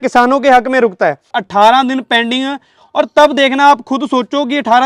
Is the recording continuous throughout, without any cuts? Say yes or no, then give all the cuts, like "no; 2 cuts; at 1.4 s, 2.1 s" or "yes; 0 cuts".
no; 1 cut; at 1.3 s